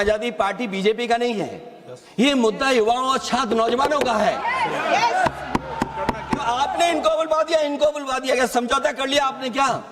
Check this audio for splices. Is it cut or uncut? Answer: uncut